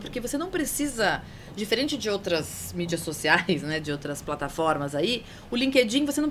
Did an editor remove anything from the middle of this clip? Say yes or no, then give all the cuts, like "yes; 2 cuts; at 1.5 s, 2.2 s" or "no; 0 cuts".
no; 0 cuts